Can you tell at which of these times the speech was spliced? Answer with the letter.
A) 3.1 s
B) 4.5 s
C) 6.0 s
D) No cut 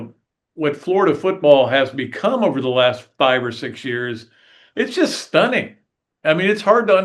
D